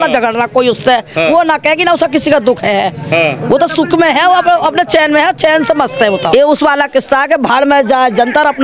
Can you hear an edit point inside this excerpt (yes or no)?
yes